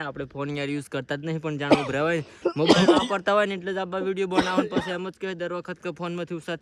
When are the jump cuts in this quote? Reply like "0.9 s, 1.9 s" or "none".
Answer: none